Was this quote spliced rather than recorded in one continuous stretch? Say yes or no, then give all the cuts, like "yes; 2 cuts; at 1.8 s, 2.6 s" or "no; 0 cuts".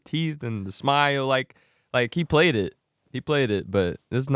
no; 0 cuts